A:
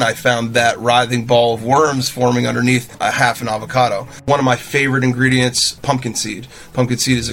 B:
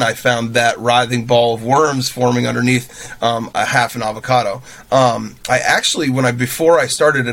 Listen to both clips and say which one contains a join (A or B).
A